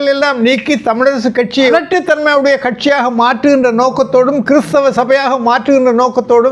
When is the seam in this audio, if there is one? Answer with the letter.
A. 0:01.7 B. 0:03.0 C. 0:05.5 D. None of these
A